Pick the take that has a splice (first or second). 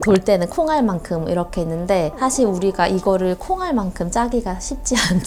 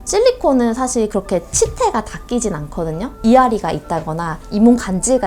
second